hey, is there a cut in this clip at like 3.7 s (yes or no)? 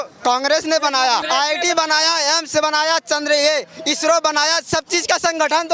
no